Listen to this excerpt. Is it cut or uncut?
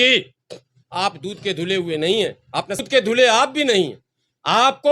cut